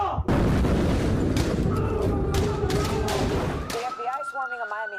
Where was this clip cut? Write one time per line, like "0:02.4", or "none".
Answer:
none